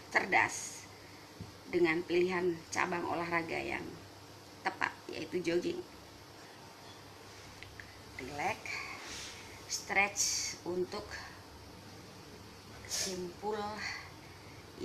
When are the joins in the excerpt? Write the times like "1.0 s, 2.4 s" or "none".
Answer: 6.5 s